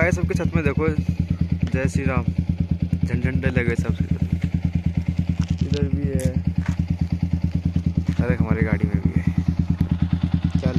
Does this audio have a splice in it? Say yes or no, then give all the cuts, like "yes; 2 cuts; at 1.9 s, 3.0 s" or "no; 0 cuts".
no; 0 cuts